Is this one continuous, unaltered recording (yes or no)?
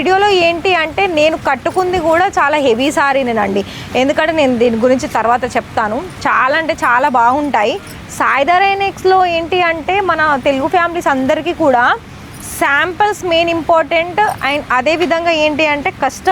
yes